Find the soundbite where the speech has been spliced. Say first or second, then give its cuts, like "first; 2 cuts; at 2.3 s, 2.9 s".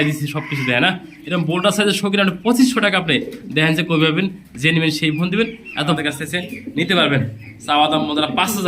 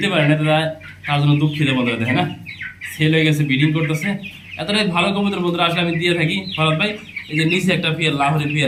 first; 1 cut; at 6.0 s